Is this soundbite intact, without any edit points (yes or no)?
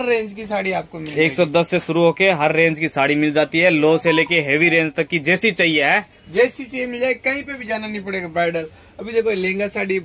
yes